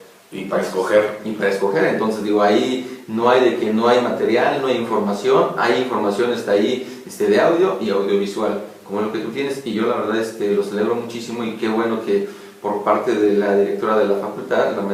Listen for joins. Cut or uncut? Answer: uncut